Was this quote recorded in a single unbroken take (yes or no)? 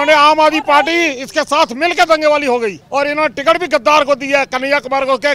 no